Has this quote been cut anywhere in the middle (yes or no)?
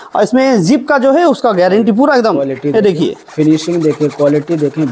no